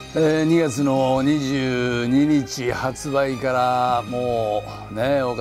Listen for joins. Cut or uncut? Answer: uncut